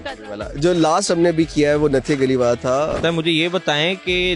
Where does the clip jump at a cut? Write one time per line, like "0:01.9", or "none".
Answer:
0:03.0